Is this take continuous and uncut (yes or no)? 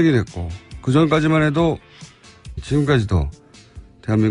yes